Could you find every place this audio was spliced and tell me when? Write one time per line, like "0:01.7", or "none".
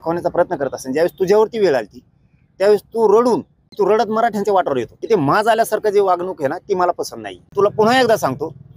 0:03.6
0:04.9
0:07.5